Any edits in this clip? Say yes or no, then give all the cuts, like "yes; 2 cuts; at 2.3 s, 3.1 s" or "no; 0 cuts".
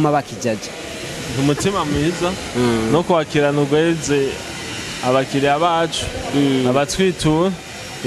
no; 0 cuts